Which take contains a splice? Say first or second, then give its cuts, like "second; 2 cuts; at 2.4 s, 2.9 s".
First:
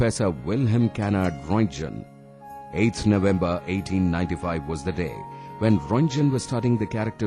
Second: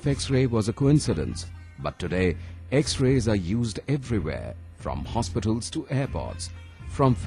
second; 1 cut; at 4.9 s